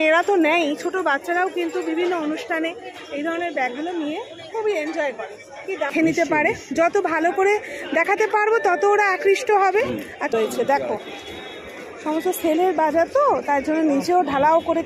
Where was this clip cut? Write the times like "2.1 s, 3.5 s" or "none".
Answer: 5.9 s, 10.3 s

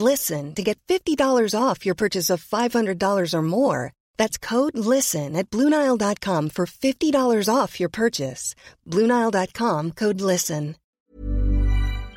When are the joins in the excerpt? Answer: 10.8 s

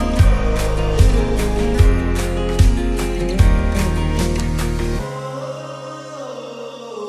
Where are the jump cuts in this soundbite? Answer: none

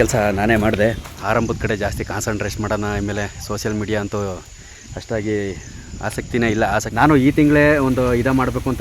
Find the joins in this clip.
1.1 s, 6.9 s

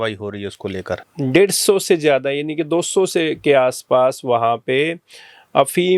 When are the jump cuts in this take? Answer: 1.0 s

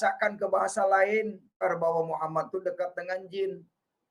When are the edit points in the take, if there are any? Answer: 1.6 s

